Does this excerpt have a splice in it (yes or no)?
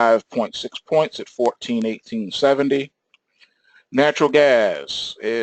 yes